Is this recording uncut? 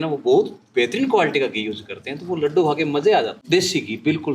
no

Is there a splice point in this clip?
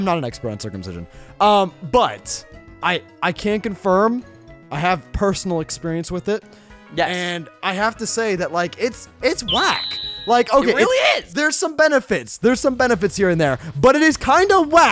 yes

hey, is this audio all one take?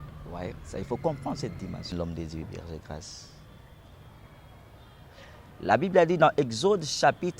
no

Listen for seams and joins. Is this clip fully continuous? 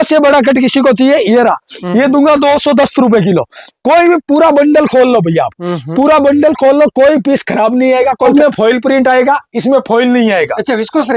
no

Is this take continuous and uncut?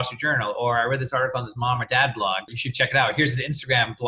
no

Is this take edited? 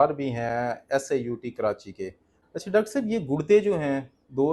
yes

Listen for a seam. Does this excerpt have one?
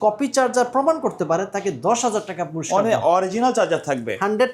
no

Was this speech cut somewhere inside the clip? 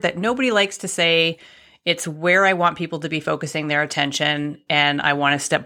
no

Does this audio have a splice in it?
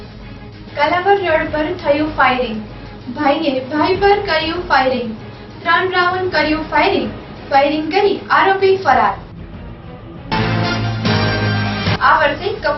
no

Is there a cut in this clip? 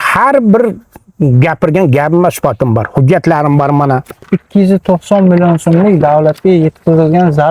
yes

